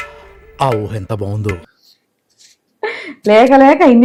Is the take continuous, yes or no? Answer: yes